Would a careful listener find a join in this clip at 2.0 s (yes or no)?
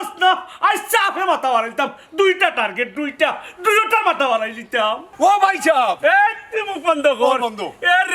no